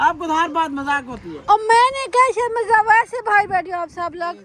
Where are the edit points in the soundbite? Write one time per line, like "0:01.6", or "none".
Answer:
none